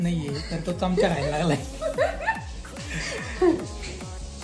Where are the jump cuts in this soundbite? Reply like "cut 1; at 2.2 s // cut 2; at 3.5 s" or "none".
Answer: none